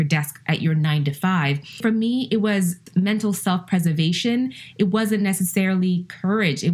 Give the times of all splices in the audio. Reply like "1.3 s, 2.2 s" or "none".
1.8 s, 2.8 s